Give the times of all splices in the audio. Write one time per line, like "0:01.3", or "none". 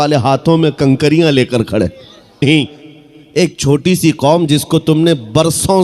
0:02.4